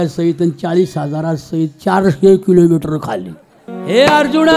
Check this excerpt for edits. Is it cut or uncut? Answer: cut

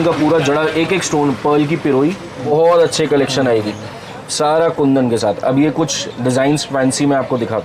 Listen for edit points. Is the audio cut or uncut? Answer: cut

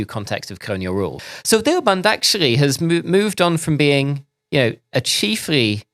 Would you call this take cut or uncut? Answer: cut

